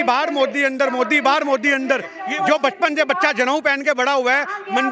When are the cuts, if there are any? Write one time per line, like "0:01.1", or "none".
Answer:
0:02.2